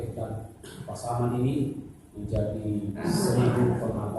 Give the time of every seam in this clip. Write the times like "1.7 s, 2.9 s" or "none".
3.1 s